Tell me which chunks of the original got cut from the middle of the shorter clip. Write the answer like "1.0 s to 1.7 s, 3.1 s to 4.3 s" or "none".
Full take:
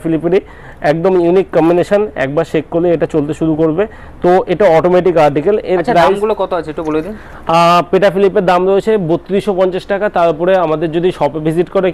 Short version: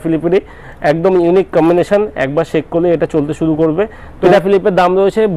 4.3 s to 8.0 s